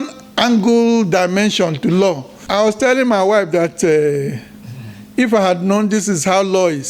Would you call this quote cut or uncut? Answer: cut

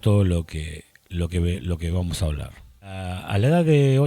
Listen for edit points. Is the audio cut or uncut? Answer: cut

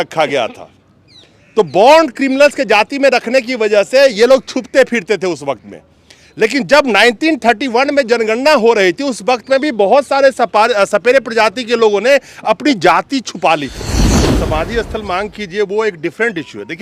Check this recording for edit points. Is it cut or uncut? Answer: cut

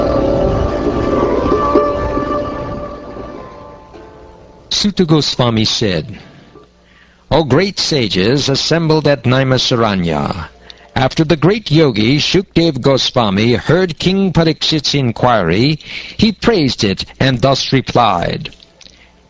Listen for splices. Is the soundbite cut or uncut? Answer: uncut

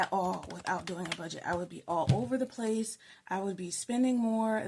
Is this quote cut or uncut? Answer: uncut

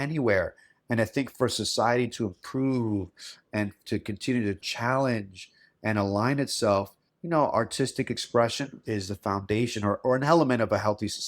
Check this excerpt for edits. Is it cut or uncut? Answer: cut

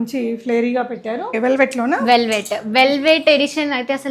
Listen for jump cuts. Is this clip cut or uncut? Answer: cut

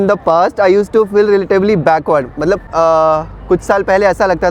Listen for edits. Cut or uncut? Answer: uncut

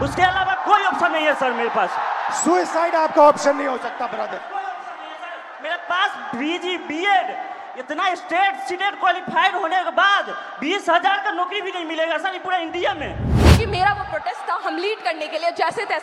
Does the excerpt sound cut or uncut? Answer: cut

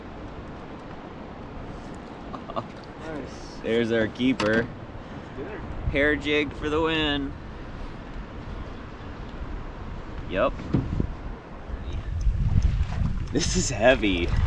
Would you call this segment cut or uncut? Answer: cut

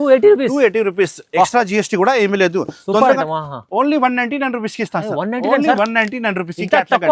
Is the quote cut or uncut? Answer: cut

